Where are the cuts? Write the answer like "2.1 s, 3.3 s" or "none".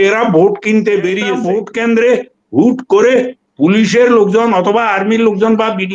1.4 s